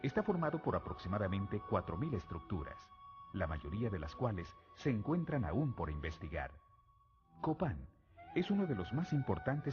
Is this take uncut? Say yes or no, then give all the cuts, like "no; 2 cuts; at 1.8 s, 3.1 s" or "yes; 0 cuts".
yes; 0 cuts